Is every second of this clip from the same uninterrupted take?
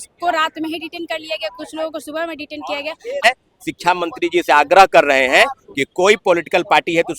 no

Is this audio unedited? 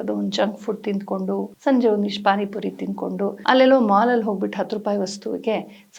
no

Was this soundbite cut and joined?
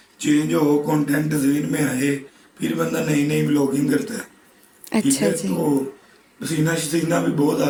no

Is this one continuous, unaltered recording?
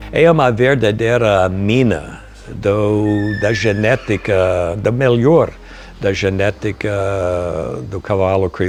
yes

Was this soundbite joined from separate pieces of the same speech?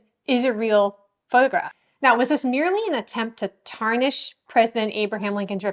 yes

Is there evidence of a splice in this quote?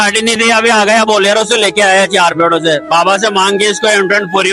no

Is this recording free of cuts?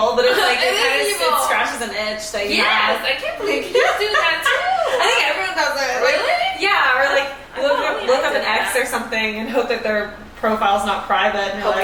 yes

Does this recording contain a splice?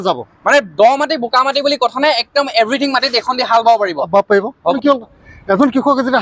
yes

